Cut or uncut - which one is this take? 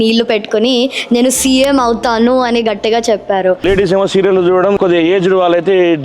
cut